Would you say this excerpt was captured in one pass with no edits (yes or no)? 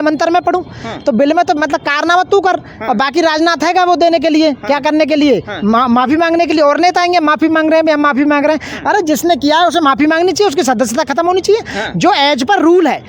yes